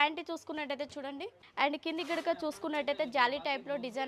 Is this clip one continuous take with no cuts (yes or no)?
no